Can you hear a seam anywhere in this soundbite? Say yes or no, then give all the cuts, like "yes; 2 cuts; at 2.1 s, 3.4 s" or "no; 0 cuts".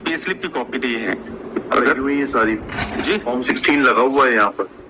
no; 0 cuts